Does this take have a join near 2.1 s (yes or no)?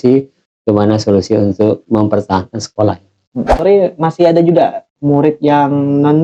no